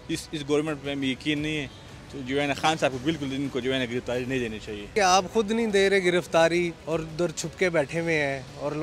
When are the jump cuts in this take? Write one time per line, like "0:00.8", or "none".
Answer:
0:04.9
0:06.8